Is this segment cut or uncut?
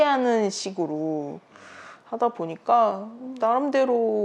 cut